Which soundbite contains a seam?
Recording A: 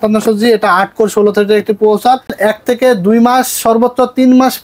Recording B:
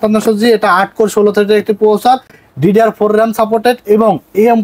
A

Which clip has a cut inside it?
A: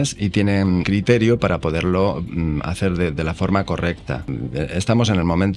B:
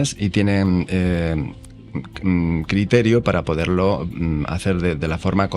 A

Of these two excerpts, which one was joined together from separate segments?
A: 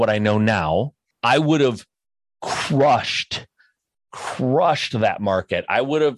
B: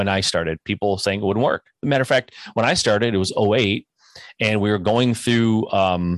A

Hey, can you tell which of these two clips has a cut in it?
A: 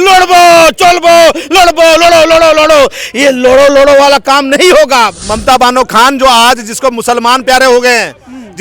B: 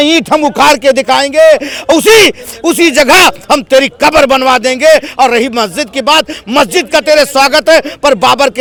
A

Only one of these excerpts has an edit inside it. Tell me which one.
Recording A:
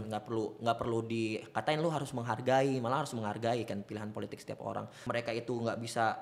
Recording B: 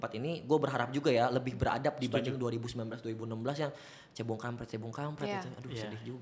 A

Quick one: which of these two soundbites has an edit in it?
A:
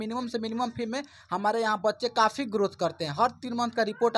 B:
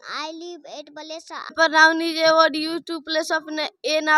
B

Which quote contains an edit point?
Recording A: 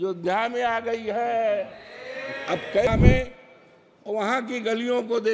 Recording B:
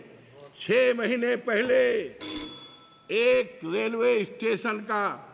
A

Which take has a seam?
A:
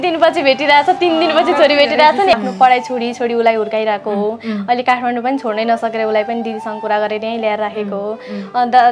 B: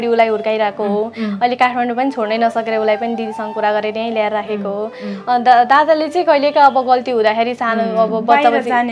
A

